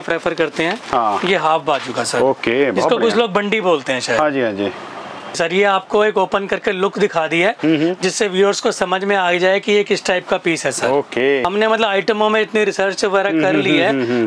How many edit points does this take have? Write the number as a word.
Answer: two